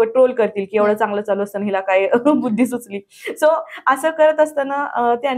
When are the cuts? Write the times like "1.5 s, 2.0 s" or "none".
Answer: none